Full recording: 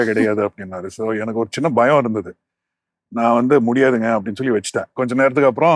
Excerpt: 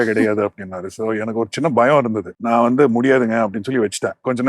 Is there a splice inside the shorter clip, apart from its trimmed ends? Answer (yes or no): yes